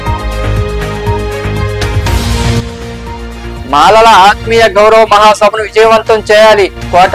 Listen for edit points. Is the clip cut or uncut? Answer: cut